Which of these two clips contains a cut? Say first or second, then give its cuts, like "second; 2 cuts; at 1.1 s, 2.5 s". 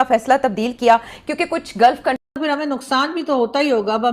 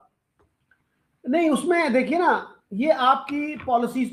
first; 1 cut; at 2.2 s